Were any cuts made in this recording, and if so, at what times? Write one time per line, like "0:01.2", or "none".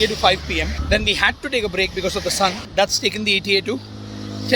none

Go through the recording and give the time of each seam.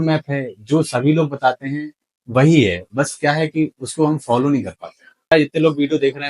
0:05.3

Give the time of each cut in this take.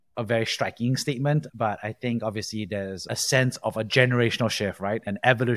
0:01.5
0:03.1

